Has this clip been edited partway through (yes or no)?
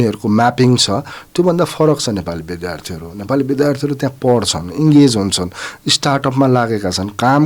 no